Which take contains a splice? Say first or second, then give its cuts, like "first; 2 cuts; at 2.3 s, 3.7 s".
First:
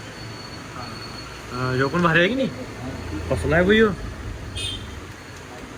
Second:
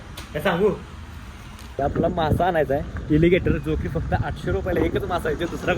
second; 1 cut; at 1.8 s